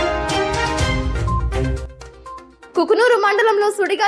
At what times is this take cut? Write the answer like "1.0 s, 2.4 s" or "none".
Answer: 1.7 s